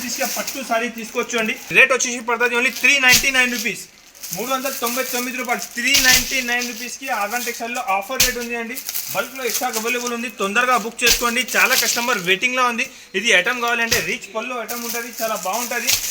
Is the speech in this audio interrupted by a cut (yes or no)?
yes